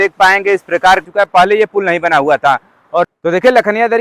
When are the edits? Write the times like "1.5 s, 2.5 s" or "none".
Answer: 1.1 s, 3.1 s